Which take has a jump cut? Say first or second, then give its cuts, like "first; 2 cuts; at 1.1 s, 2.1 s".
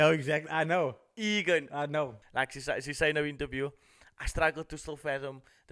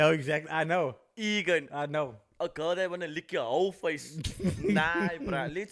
first; 1 cut; at 2.2 s